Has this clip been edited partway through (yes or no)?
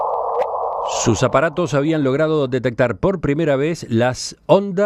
yes